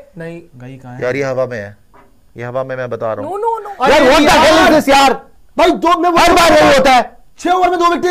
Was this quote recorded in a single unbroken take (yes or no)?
yes